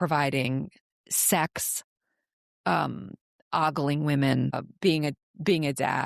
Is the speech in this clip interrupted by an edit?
yes; 1 cut; at 4.7 s

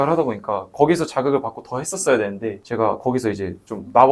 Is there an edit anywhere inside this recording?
no; 0 cuts

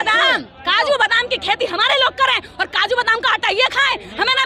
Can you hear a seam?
no; 0 cuts

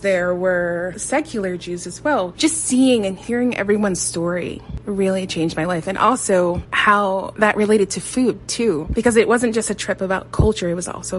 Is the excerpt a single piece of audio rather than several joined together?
no; 3 cuts; at 1.0 s, 2.3 s, 8.9 s

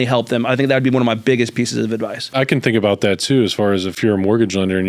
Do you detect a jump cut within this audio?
yes; 2 cuts; at 2.3 s, 3.9 s

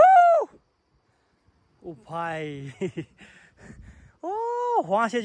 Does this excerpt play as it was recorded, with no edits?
yes; 0 cuts

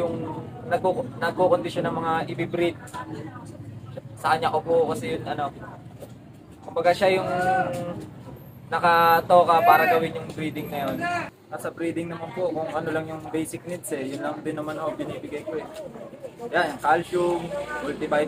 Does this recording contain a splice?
yes; 1 cut; at 11.3 s

